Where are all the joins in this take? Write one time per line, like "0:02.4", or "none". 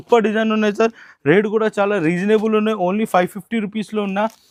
none